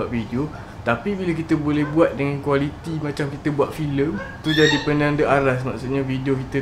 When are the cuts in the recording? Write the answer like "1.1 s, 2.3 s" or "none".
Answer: none